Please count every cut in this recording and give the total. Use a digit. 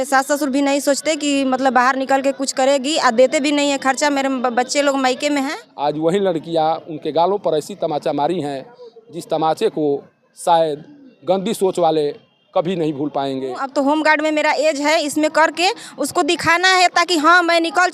2